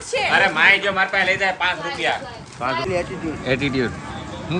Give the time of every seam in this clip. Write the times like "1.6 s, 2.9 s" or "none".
2.8 s